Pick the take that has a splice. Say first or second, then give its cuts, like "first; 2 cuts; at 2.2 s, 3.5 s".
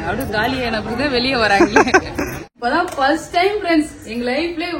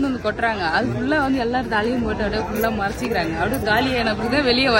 first; 1 cut; at 2.5 s